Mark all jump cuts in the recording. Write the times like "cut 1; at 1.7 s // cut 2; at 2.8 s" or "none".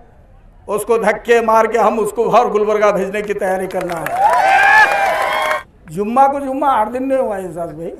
cut 1; at 5.6 s

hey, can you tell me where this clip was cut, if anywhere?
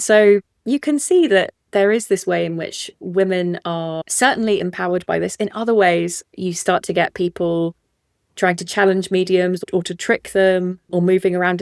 cut 1; at 1.6 s // cut 2; at 4.6 s // cut 3; at 6.3 s

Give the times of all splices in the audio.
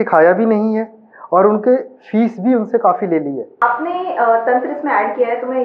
cut 1; at 3.4 s

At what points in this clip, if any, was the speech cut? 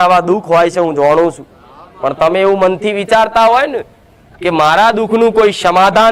none

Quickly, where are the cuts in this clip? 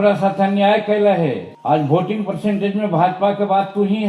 cut 1; at 1.5 s

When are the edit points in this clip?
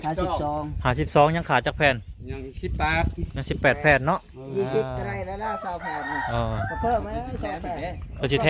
none

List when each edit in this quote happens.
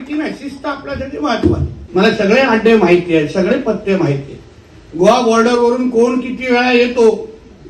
cut 1; at 1.7 s

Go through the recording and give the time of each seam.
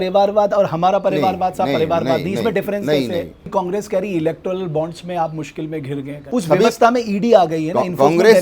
cut 1; at 3.5 s // cut 2; at 6.2 s

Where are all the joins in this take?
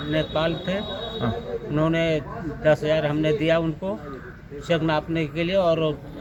none

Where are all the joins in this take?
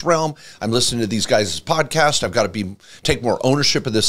none

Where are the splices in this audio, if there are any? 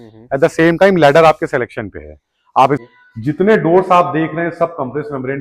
cut 1; at 2.8 s

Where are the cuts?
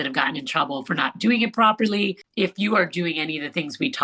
cut 1; at 2.2 s

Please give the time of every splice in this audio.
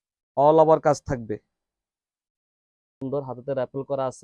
cut 1; at 3.0 s

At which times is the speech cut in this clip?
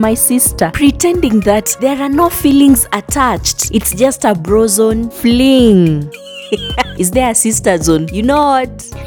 none

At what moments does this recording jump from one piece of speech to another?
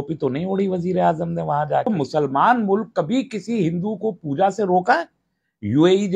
cut 1; at 1.9 s

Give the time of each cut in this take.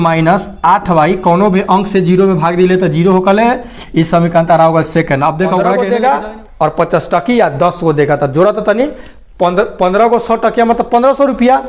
cut 1; at 5.7 s

